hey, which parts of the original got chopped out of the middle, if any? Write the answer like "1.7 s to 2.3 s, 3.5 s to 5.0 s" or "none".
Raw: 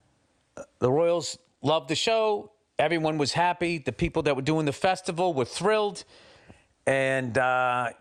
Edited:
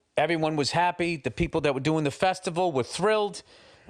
none

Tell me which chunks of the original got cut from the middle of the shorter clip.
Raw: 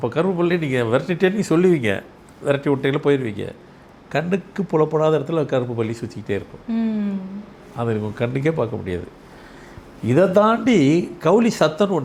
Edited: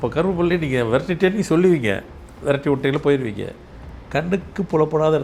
none

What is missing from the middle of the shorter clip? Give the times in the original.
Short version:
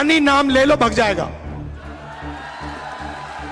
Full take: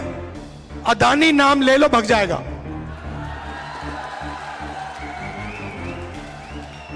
none

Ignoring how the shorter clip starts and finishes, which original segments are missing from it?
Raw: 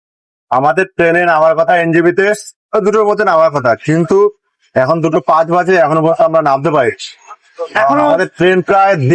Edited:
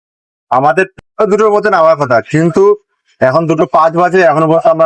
0.9 s to 2.4 s

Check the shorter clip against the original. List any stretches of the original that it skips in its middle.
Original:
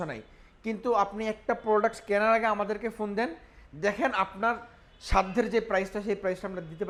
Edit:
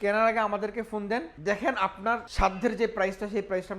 3.4 s to 3.7 s, 4.6 s to 5.0 s

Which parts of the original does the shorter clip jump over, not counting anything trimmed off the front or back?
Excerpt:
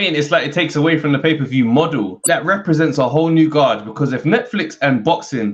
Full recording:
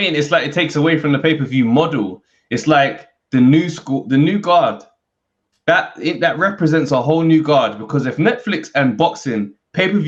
2.2 s to 6.2 s

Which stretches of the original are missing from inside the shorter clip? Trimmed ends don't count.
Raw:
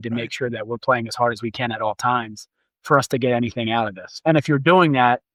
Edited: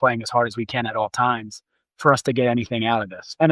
none

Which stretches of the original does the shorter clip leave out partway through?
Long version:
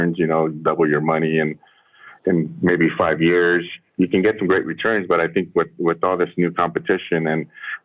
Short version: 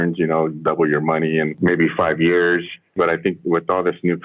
1.5 s to 2.5 s, 3.9 s to 5.3 s

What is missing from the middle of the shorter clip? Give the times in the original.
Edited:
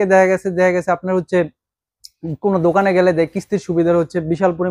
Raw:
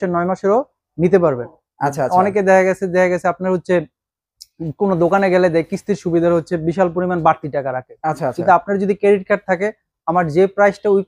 none

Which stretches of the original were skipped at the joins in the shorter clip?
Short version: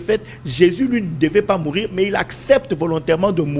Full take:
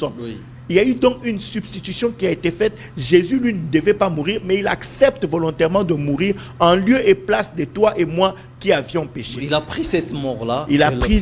none

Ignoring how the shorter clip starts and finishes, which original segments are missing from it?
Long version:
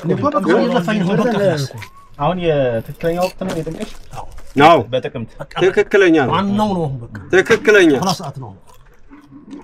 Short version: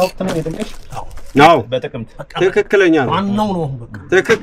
none

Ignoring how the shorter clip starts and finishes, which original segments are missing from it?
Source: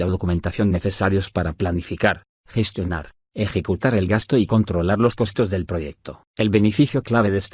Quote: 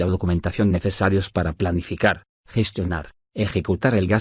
none

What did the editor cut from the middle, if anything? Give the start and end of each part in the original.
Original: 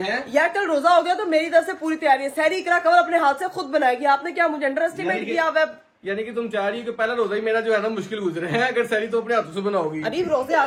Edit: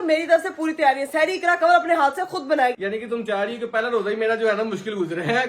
4.0 s to 6.0 s

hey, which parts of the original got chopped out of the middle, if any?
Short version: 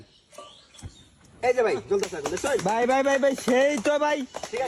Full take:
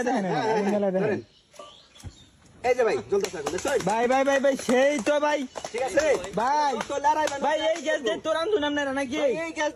none

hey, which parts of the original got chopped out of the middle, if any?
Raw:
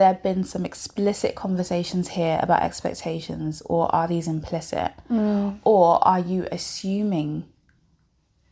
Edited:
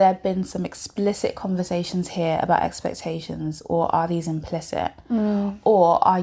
none

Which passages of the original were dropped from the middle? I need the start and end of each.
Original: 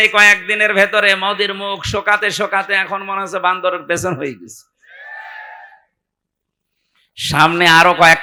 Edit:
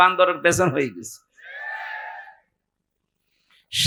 none

